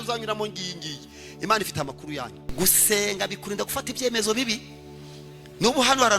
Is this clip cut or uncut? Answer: cut